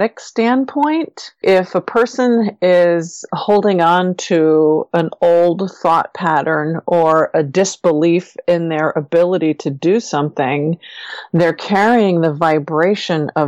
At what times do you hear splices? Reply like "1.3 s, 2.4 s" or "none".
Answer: 1.4 s